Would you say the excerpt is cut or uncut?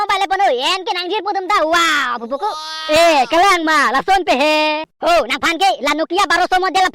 cut